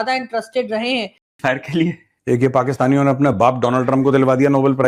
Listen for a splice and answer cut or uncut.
cut